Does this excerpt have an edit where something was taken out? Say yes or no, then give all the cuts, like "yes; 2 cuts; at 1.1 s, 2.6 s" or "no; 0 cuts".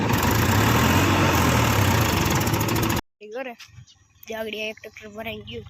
yes; 1 cut; at 3.0 s